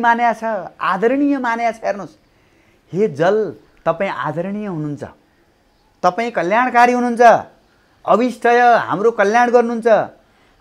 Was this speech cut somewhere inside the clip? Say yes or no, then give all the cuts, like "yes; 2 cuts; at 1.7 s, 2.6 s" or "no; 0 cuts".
no; 0 cuts